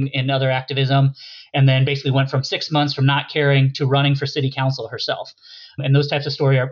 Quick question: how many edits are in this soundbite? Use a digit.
1